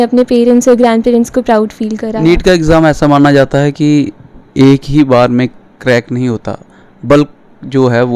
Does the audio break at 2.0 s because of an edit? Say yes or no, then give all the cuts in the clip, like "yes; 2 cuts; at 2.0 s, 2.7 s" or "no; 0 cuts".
yes; 1 cut; at 2.0 s